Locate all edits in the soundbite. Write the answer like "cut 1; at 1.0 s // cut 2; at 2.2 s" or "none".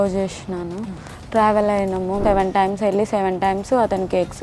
cut 1; at 2.2 s